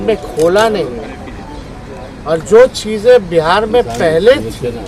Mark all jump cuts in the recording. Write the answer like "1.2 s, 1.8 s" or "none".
none

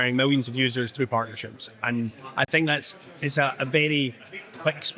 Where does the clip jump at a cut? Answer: none

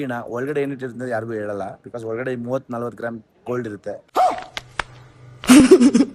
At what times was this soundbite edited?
none

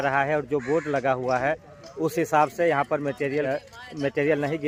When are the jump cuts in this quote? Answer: none

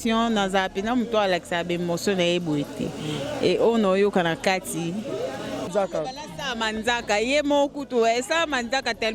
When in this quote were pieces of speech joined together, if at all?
5.7 s

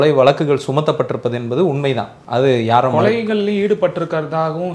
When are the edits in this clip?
2.1 s

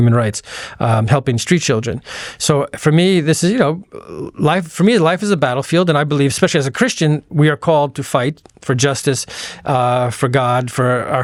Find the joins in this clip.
none

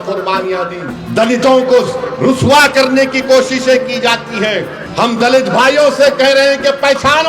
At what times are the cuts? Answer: 0.9 s, 4.8 s

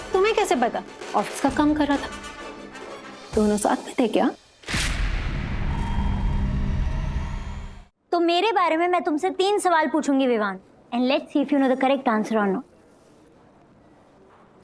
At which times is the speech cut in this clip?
0.9 s, 7.6 s

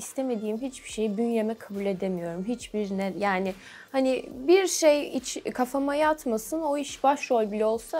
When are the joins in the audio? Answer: none

